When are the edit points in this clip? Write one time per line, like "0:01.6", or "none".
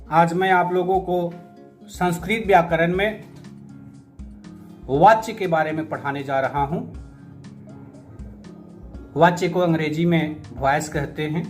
0:03.3
0:04.7
0:07.1
0:08.7